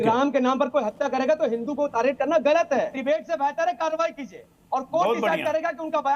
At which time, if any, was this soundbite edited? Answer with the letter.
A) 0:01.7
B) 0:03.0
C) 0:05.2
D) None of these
B